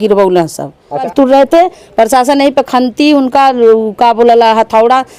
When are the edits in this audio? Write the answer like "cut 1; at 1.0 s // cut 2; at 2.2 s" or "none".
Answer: cut 1; at 1.1 s